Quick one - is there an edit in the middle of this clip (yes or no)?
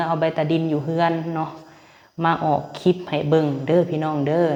no